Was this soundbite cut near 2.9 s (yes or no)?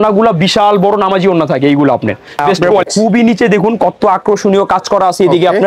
yes